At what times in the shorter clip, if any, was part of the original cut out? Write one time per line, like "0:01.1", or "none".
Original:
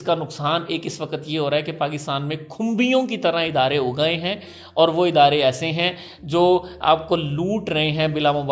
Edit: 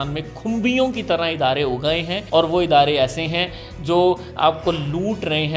0:02.1

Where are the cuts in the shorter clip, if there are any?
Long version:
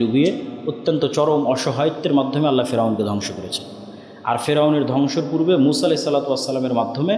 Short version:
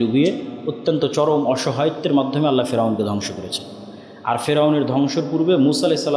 none

